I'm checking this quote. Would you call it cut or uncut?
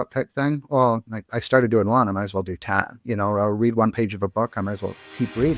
uncut